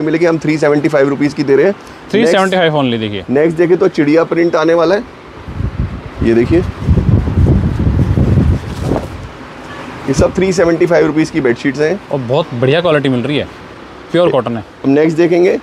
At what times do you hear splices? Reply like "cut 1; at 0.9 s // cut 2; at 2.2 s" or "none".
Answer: none